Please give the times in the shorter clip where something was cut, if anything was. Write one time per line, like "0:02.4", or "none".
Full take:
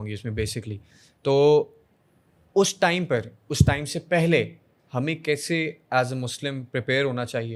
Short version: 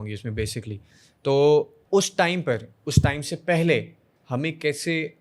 0:01.8